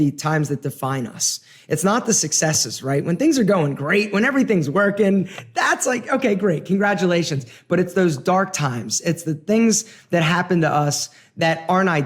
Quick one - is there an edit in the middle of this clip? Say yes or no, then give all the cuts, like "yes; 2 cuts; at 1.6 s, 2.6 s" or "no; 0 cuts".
no; 0 cuts